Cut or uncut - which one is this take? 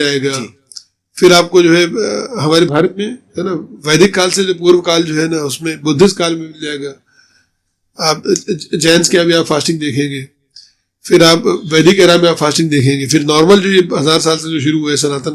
uncut